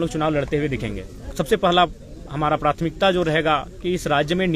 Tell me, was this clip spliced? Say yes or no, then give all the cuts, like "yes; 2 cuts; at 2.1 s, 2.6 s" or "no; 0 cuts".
yes; 1 cut; at 1.3 s